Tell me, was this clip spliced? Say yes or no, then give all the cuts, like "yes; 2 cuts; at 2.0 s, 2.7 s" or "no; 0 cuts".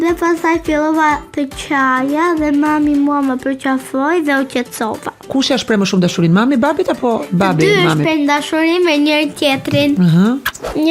yes; 1 cut; at 5.2 s